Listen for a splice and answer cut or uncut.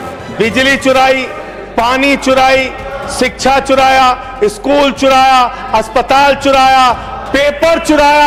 uncut